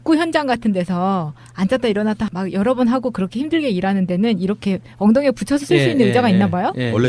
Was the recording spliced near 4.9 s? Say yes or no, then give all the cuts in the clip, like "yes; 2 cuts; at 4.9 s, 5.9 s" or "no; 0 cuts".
yes; 1 cut; at 4.9 s